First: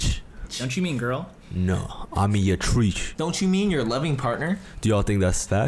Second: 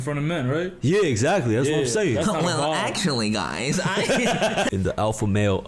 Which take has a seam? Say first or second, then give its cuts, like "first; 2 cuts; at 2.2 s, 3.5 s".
second; 1 cut; at 4.7 s